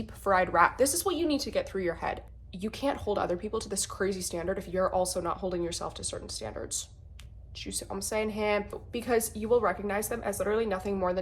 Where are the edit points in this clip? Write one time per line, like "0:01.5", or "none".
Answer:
0:02.2
0:08.8